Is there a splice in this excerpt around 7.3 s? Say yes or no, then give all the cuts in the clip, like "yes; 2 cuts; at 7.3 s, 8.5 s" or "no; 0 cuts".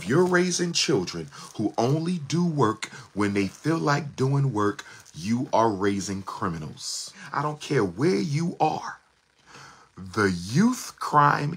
yes; 1 cut; at 7.3 s